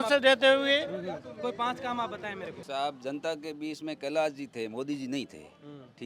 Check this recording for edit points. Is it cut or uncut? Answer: cut